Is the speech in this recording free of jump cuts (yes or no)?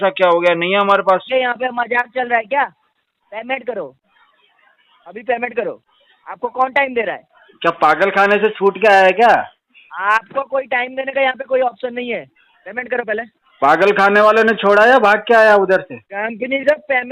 no